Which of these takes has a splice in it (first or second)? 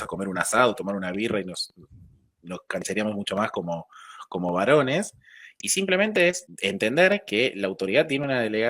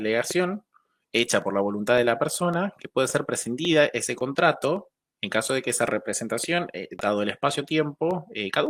first